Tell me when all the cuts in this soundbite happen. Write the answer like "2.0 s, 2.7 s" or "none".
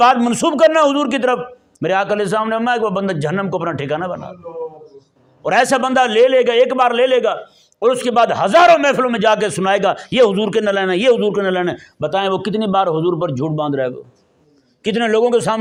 none